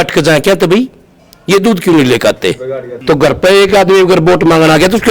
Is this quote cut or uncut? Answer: cut